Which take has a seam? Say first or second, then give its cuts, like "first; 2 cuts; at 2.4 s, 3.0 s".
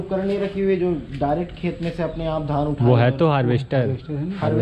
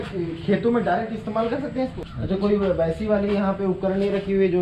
second; 1 cut; at 2.0 s